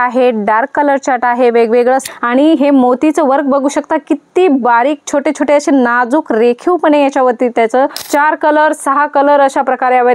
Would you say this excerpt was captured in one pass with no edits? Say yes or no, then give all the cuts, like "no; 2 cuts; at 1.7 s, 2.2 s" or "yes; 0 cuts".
no; 2 cuts; at 2.1 s, 8.0 s